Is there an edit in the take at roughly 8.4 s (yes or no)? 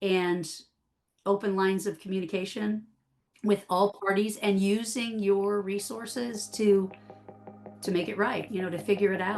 yes